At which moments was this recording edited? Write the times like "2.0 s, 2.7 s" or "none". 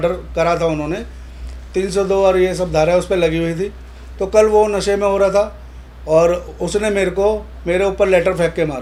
none